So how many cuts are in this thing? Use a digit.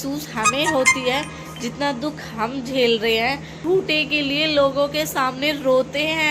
1